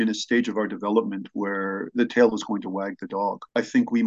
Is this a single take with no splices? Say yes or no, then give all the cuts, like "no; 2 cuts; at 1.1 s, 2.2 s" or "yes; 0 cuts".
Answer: yes; 0 cuts